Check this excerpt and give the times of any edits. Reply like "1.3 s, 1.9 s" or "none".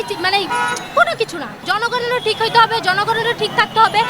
1.6 s